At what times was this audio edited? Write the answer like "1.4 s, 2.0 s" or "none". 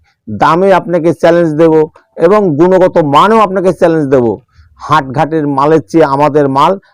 none

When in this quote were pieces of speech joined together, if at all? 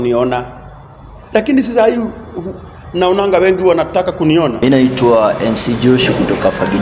4.6 s

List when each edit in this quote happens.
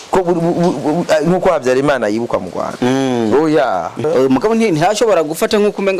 4.0 s

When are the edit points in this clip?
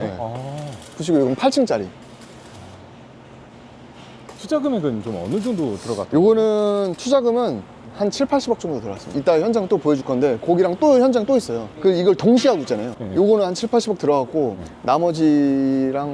9.1 s

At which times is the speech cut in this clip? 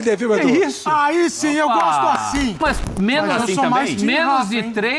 2.6 s

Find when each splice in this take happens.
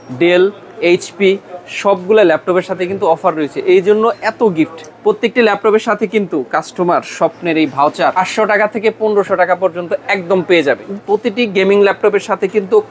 4.8 s, 8.2 s, 10.9 s

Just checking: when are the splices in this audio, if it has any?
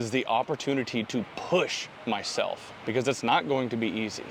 2.7 s

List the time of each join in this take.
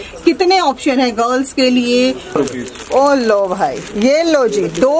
2.4 s

